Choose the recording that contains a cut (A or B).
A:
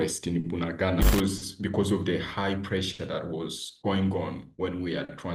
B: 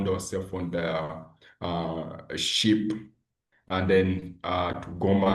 A